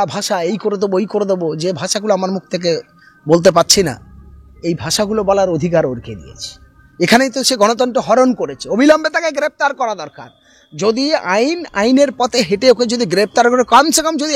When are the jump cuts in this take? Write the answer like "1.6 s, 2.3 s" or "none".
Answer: none